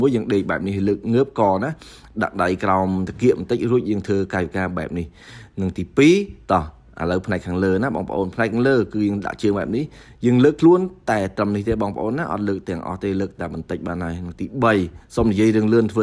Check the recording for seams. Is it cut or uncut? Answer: uncut